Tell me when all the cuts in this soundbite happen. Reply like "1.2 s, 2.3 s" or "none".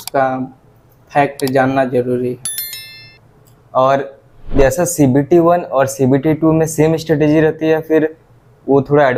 none